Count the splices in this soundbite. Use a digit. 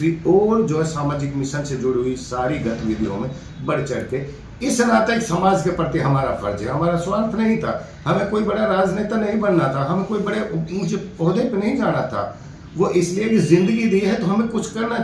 0